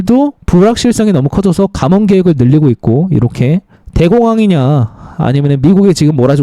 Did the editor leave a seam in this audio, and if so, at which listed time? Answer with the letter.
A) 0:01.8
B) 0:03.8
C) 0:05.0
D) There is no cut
B